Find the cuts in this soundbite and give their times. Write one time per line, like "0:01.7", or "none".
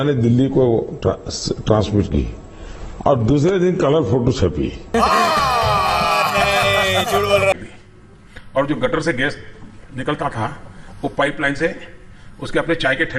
0:07.5